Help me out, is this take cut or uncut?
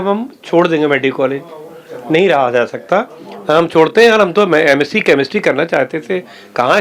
uncut